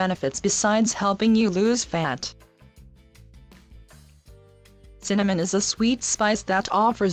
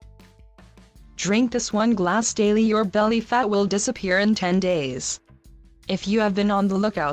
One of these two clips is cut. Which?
first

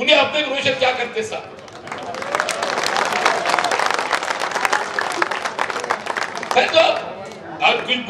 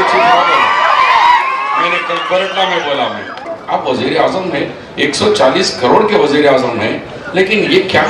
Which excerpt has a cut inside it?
second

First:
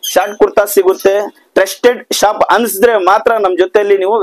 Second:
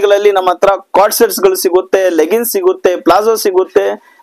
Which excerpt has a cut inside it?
first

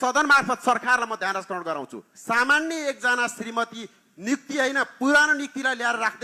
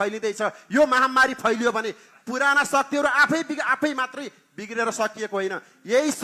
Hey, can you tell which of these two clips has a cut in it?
first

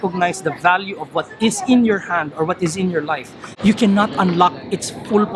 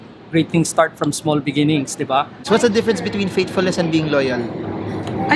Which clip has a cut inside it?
second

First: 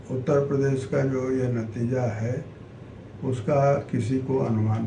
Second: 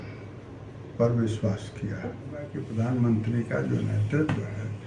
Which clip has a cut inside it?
second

